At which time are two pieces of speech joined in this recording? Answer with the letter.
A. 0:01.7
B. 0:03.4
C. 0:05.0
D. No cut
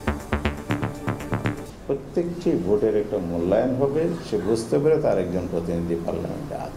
A